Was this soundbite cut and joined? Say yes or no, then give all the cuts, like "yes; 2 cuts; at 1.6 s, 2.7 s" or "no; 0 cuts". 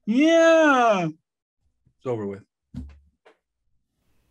no; 0 cuts